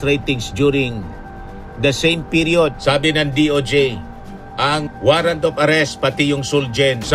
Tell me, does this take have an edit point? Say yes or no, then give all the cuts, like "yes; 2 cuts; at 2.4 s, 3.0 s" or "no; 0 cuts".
yes; 1 cut; at 2.7 s